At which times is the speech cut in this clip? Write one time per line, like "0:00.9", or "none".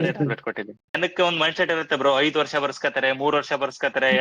0:01.0